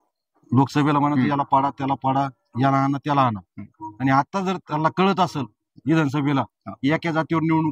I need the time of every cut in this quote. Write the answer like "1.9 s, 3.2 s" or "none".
none